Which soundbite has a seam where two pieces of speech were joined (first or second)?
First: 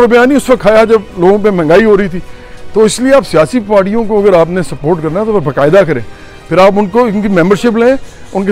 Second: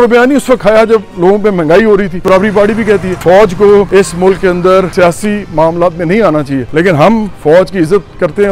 second